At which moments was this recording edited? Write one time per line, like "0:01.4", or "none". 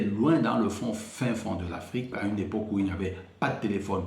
0:02.2